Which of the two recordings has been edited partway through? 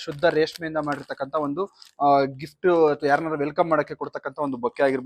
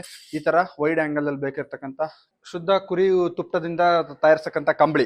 second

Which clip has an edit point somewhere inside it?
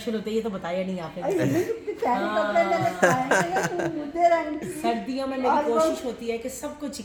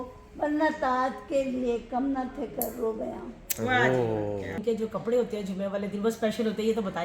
second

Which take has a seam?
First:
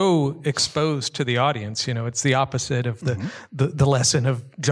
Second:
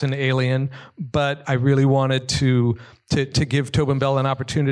second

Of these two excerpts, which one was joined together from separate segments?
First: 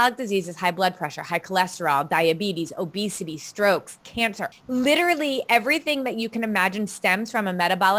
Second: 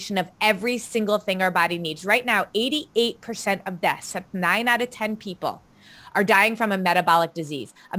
first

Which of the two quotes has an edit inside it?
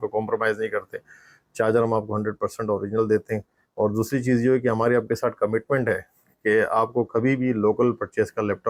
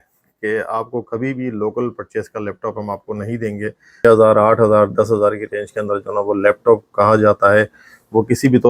second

